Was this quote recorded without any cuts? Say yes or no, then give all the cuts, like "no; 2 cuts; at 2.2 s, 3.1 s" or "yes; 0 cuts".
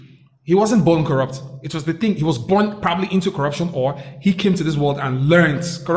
yes; 0 cuts